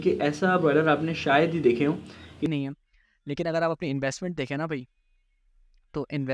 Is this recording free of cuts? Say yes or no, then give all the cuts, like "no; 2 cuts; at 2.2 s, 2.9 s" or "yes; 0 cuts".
no; 1 cut; at 2.5 s